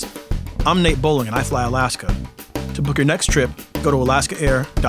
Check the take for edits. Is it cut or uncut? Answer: uncut